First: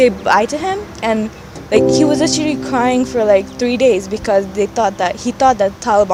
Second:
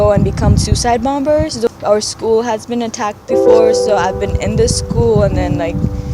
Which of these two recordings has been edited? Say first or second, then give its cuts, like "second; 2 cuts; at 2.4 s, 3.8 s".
second; 1 cut; at 1.7 s